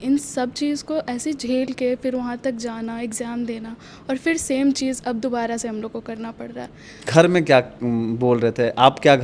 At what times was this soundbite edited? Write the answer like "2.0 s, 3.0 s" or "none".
7.0 s